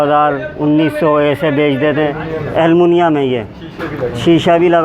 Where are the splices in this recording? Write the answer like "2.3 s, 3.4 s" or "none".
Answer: 2.3 s